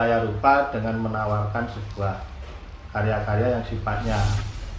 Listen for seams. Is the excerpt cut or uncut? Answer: uncut